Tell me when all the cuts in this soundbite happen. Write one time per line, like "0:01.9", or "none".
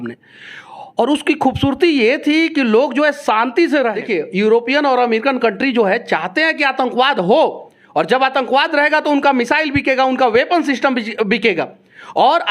0:04.0